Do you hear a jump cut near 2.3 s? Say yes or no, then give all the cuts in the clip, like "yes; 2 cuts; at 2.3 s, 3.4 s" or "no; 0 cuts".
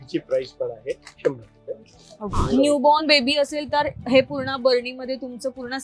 yes; 1 cut; at 2.3 s